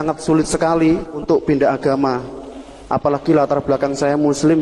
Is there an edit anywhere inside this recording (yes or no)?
yes